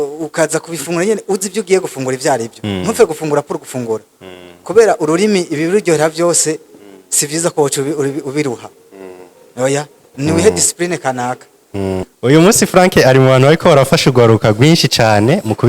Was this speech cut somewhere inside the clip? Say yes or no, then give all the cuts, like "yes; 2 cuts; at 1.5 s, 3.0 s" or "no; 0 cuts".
yes; 1 cut; at 12.1 s